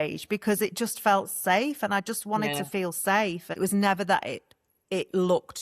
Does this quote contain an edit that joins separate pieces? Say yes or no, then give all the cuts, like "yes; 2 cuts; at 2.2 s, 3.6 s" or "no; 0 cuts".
yes; 1 cut; at 3.6 s